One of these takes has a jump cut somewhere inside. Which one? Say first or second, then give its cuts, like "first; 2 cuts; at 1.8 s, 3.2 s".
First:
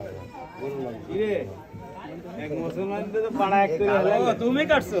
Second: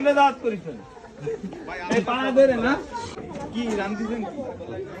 second; 1 cut; at 3.1 s